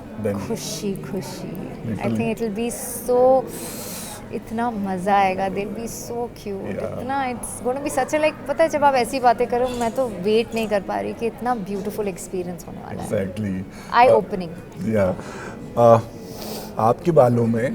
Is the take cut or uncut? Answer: uncut